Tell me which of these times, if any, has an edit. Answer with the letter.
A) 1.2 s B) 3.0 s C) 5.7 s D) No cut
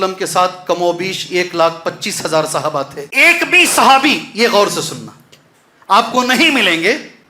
B